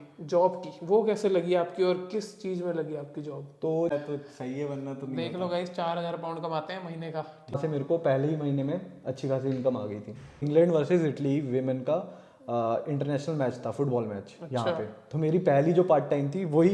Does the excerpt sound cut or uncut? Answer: cut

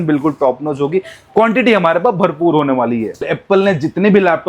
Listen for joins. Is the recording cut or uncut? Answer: cut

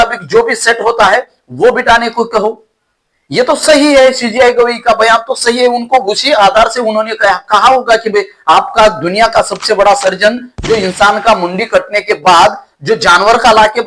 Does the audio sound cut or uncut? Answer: cut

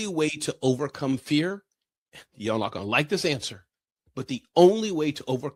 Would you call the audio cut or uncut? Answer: uncut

